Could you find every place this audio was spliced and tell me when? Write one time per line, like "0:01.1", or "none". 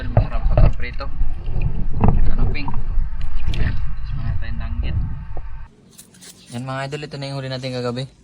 0:05.6